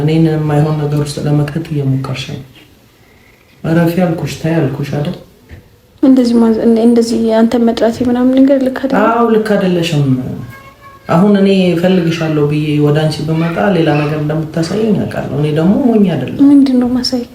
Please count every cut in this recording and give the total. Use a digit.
0